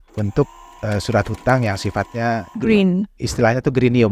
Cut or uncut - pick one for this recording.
cut